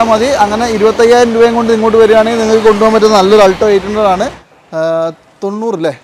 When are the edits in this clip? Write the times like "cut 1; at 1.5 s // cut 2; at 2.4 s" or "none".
cut 1; at 4.5 s